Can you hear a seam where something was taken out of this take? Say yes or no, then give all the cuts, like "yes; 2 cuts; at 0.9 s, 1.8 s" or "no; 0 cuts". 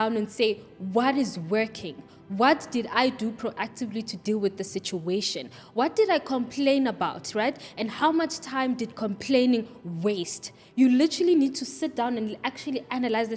no; 0 cuts